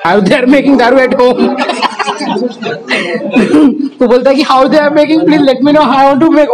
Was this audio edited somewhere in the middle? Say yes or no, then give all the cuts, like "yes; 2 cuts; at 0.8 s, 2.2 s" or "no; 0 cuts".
no; 0 cuts